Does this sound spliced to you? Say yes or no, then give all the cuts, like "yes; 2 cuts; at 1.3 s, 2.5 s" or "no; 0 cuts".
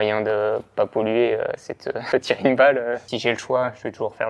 yes; 2 cuts; at 1.9 s, 3.1 s